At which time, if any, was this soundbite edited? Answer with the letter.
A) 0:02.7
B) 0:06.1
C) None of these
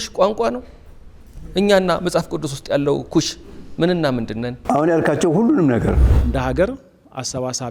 B